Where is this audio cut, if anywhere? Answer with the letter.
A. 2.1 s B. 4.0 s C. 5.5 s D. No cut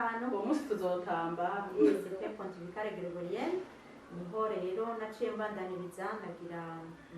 A